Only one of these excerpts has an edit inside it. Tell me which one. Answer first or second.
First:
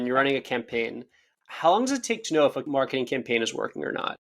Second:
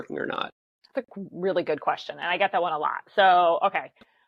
first